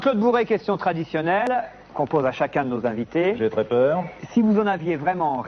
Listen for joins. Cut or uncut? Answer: cut